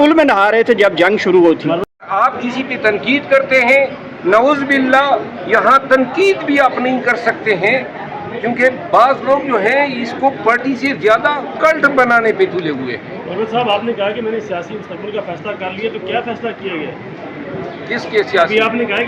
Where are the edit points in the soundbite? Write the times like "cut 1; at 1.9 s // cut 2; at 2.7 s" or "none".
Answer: cut 1; at 1.8 s